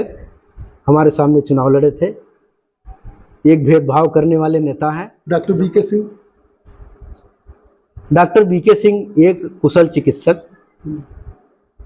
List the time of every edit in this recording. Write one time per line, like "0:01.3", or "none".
0:05.1